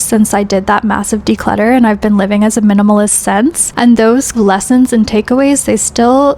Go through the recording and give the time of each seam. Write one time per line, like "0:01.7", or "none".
0:03.7
0:04.3